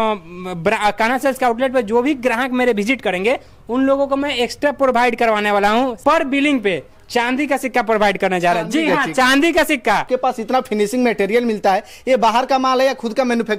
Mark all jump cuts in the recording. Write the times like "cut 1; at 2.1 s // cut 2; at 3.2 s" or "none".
cut 1; at 6.0 s // cut 2; at 10.1 s